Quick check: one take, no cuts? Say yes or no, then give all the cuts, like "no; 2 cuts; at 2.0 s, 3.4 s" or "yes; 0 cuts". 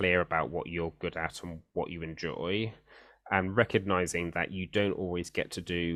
yes; 0 cuts